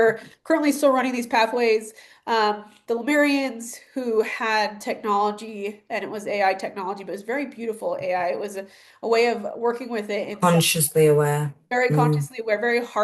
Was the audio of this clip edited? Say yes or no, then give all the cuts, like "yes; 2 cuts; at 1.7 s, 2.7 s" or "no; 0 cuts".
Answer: no; 0 cuts